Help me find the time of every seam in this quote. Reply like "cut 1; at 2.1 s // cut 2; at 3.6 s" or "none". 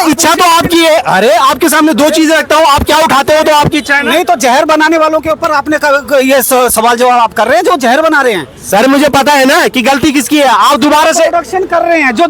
none